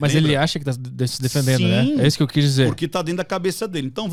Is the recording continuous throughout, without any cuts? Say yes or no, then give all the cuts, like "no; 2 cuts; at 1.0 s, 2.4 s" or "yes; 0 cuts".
yes; 0 cuts